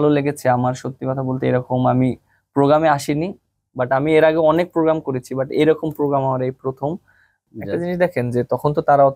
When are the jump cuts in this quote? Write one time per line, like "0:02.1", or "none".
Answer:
0:07.3